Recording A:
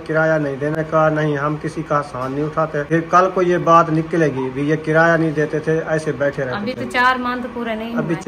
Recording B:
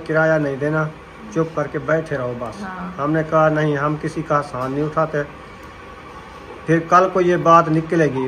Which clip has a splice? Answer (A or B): A